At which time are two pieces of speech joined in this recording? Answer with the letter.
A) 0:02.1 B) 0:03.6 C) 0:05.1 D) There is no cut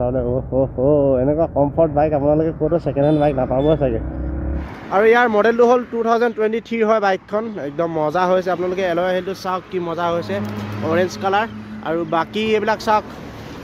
C